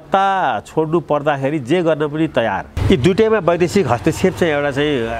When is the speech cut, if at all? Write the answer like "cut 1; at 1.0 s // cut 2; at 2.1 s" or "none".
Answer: cut 1; at 2.7 s